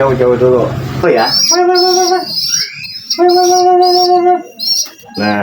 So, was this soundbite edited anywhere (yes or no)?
yes